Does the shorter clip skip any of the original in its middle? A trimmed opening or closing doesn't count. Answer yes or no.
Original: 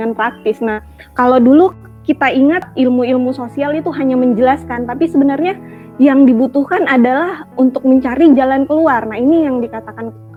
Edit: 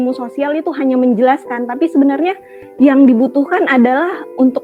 no